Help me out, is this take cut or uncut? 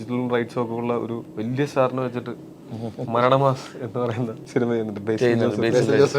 cut